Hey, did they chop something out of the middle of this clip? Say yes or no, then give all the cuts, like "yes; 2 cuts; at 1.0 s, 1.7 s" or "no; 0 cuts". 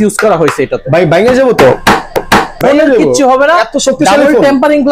yes; 1 cut; at 2.3 s